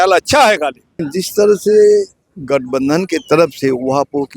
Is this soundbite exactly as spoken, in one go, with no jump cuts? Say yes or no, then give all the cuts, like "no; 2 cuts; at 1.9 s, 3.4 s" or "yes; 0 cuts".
no; 1 cut; at 0.9 s